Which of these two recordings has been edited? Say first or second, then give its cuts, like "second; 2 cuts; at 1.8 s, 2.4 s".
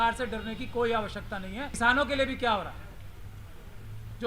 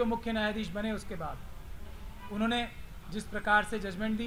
first; 1 cut; at 1.7 s